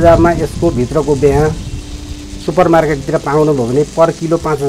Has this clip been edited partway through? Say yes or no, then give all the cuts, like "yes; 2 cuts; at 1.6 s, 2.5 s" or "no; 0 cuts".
no; 0 cuts